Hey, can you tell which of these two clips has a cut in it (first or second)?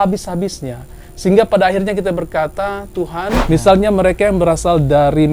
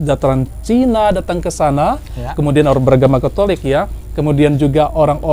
first